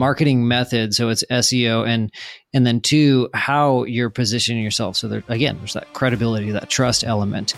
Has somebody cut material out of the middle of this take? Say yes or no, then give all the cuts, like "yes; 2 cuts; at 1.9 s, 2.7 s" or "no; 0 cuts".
no; 0 cuts